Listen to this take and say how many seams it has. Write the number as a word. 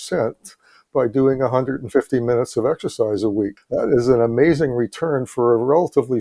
one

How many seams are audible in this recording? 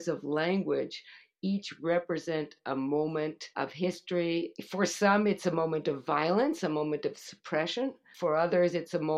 three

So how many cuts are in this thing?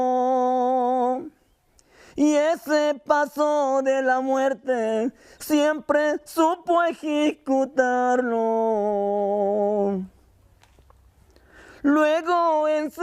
one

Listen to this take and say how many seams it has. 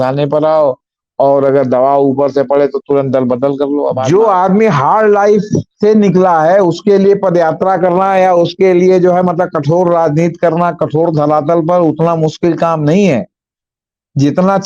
one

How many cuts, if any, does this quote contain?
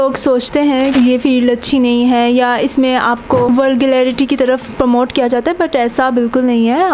two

